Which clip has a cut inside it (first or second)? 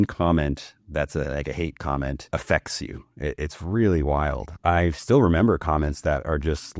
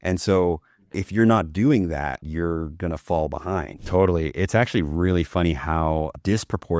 second